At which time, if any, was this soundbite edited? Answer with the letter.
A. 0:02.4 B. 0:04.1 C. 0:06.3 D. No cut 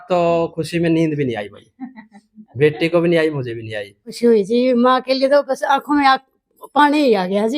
B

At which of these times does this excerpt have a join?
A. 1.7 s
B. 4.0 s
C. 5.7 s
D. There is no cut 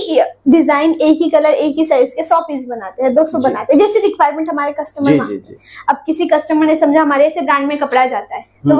D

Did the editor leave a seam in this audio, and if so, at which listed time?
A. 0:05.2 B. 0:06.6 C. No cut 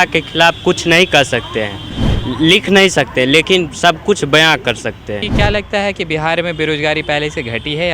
A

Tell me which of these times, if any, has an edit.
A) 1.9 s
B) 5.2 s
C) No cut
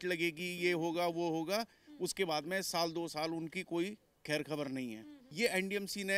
B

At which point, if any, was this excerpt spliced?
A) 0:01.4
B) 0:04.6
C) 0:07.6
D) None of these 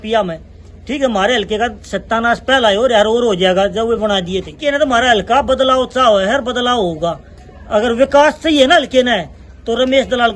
B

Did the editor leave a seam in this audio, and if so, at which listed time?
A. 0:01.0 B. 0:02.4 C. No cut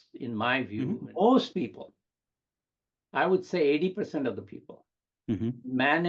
A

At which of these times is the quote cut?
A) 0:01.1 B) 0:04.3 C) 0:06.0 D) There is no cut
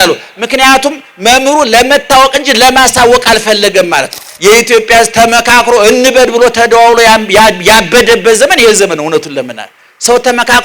B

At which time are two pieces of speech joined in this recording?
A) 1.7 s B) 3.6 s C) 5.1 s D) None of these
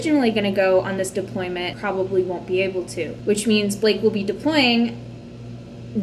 A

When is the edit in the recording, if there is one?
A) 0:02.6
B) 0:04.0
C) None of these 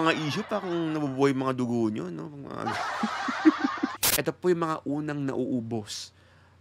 B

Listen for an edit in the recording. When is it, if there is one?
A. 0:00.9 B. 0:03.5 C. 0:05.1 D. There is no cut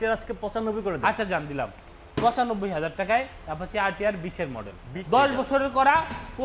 C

